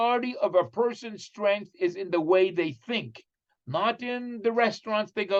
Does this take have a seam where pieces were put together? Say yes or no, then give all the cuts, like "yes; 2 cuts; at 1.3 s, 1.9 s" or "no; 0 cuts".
no; 0 cuts